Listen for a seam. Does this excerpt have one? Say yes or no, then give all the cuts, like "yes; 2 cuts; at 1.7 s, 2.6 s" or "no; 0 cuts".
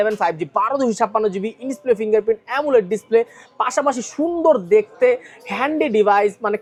no; 0 cuts